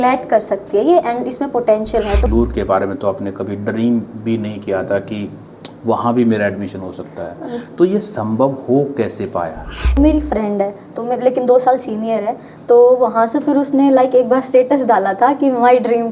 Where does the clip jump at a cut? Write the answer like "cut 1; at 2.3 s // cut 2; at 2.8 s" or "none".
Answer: cut 1; at 2.3 s // cut 2; at 10.0 s